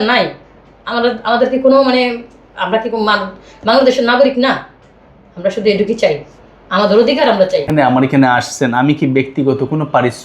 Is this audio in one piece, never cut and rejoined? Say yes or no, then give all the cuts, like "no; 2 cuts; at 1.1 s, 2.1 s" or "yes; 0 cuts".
no; 1 cut; at 7.7 s